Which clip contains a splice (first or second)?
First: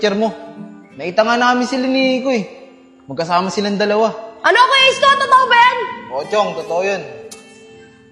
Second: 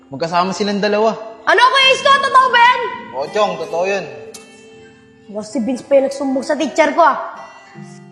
second